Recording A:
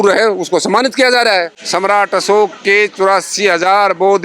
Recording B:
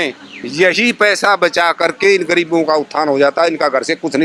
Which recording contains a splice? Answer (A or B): A